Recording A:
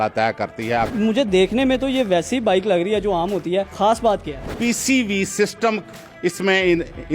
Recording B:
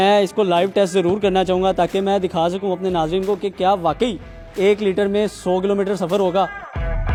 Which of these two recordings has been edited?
A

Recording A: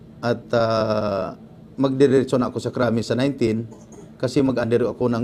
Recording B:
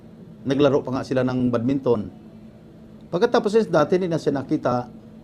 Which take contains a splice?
B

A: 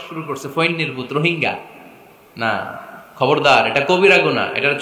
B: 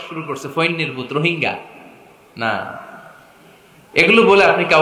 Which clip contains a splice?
A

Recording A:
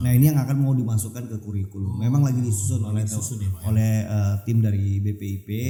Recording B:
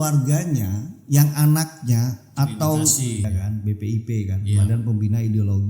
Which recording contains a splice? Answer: B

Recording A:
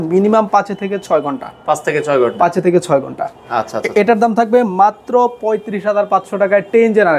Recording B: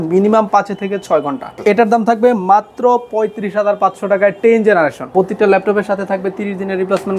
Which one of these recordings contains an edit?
B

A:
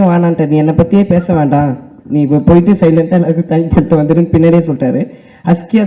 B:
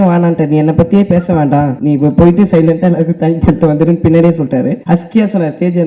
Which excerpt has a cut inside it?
B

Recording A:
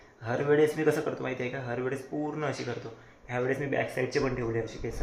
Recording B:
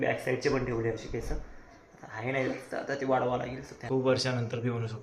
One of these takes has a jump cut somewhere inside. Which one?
B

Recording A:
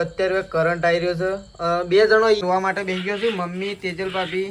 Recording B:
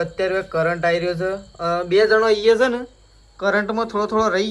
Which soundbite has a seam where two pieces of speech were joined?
A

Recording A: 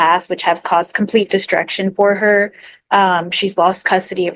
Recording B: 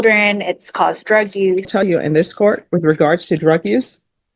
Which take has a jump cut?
B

